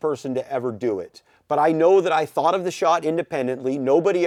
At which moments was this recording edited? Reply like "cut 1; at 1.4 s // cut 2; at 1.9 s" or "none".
none